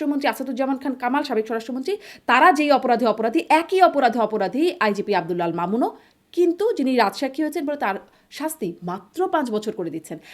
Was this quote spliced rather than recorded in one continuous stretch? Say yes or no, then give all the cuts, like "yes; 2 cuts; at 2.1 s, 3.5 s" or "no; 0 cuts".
no; 0 cuts